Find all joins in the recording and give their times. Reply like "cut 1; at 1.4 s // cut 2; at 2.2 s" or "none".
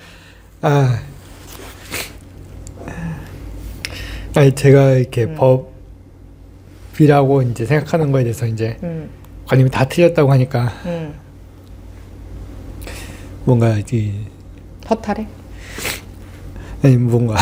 none